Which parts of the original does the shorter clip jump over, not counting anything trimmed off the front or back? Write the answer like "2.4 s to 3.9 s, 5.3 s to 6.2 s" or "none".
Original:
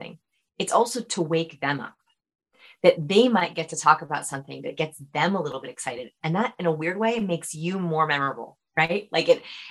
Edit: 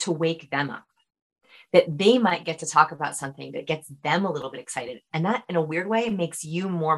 none